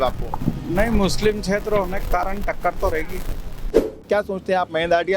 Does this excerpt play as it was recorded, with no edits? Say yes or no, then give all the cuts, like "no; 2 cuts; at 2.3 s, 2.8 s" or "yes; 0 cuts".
no; 1 cut; at 4.1 s